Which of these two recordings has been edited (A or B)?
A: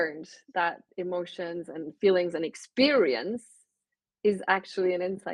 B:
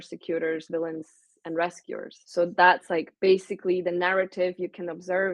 B